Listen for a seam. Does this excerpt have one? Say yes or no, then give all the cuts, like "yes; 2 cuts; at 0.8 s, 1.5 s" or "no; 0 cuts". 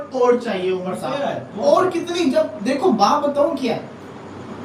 no; 0 cuts